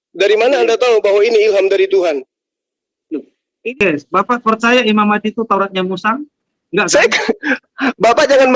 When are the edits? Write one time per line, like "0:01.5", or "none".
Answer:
0:03.7